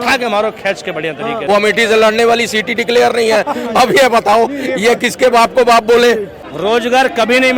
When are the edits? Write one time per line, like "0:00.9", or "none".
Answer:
0:01.4
0:06.4